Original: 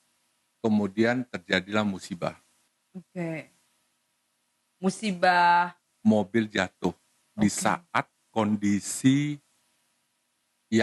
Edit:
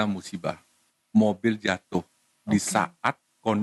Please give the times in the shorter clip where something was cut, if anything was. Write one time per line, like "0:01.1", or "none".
0:00.9